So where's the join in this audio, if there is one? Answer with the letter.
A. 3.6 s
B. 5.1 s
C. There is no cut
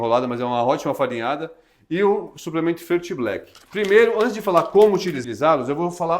B